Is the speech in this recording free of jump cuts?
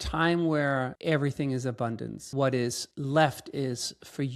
no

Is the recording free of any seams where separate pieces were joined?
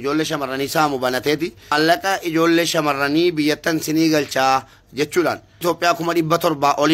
no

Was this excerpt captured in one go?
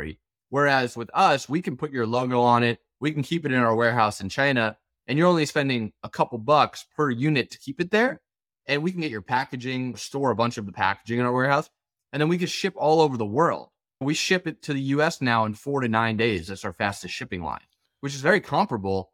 yes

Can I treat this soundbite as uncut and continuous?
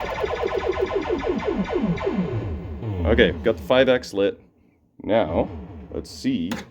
no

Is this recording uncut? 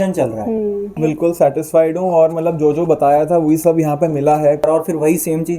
no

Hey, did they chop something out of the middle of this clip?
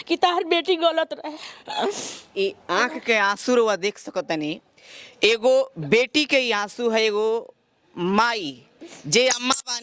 no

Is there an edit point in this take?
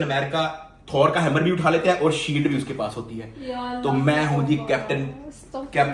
no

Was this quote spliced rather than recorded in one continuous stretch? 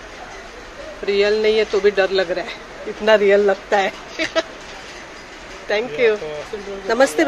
no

